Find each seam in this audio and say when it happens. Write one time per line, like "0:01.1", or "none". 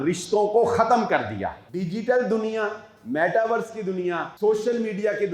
0:01.6
0:04.3